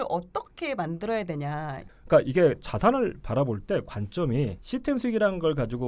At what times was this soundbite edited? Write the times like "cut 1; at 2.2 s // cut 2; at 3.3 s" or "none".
cut 1; at 1.8 s // cut 2; at 4.6 s